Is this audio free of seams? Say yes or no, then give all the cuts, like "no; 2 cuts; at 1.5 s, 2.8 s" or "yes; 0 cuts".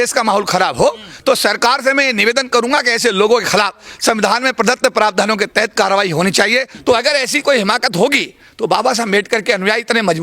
no; 1 cut; at 6.7 s